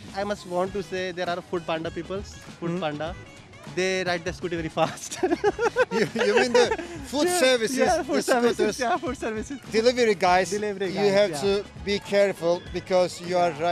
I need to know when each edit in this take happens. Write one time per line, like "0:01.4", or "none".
none